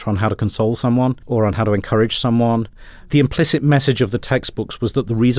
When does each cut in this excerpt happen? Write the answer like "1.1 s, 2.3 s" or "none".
1.2 s, 3.0 s